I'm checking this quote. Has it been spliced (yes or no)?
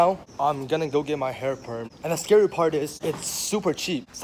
no